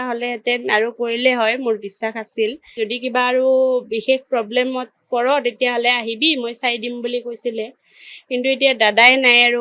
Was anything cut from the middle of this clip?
yes; 1 cut; at 2.8 s

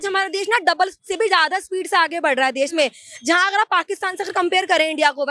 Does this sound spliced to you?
no; 0 cuts

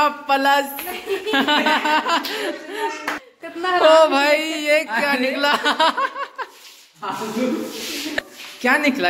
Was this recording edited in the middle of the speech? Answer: yes; 2 cuts; at 3.2 s, 8.1 s

